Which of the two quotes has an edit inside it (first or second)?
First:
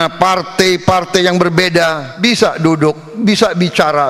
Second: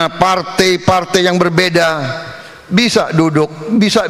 first